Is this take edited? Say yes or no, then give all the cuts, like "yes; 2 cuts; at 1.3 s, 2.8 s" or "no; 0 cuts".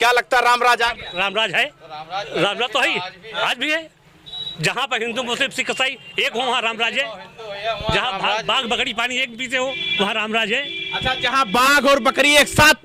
no; 0 cuts